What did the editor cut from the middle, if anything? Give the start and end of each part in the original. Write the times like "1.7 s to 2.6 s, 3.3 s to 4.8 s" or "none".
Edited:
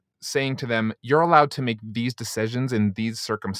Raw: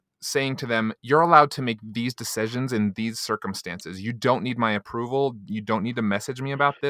none